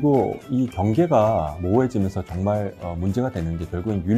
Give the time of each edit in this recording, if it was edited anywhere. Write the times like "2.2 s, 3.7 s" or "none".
none